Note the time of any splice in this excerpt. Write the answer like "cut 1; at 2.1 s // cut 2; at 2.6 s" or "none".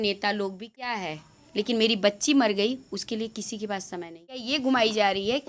cut 1; at 0.9 s // cut 2; at 4.5 s